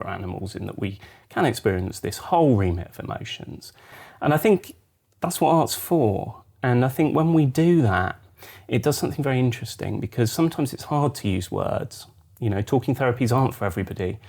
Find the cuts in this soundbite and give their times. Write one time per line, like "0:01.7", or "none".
0:04.0